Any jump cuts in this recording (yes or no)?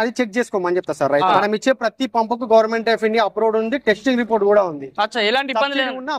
yes